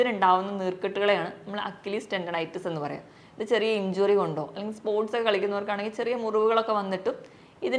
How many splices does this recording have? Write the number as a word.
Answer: zero